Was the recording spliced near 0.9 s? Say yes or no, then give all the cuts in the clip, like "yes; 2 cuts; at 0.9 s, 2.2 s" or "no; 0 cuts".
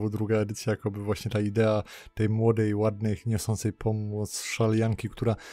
no; 0 cuts